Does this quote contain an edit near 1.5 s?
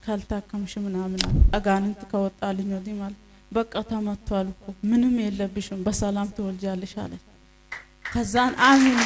yes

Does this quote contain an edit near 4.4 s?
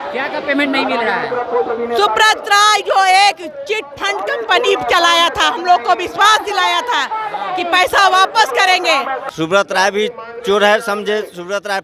no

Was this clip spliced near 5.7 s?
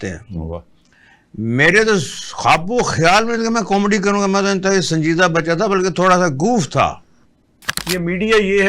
no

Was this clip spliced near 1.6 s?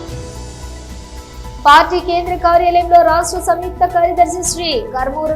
yes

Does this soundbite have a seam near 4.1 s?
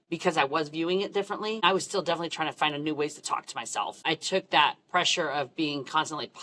yes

